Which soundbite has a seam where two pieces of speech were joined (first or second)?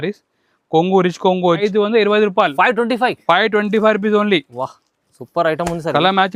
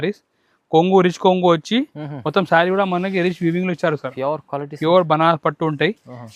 first